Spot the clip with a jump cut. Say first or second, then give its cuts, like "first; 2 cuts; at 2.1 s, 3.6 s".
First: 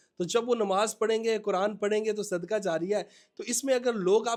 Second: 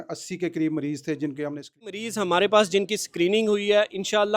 second; 1 cut; at 2.0 s